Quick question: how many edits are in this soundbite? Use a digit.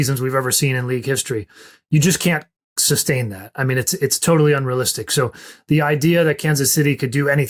0